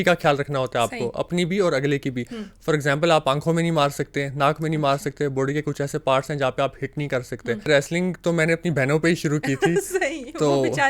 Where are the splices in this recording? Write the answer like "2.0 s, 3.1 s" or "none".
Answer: 7.7 s